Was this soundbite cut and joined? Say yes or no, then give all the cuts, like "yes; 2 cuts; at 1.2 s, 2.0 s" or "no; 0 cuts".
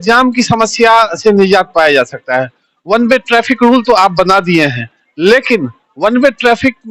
no; 0 cuts